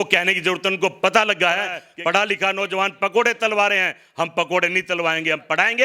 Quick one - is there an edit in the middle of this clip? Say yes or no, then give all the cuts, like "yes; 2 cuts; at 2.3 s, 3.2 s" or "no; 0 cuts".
yes; 1 cut; at 1.8 s